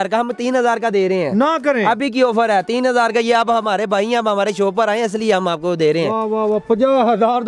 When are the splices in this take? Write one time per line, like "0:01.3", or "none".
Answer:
none